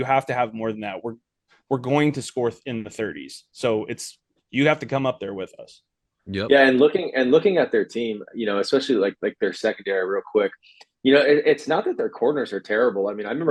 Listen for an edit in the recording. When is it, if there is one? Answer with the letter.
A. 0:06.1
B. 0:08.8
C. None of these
C